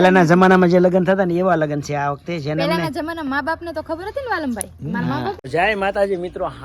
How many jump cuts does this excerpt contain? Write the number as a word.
one